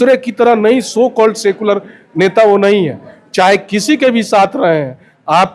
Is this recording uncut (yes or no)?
yes